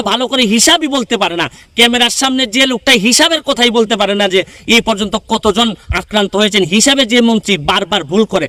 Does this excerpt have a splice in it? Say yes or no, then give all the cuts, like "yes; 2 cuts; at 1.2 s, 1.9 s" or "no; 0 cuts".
no; 0 cuts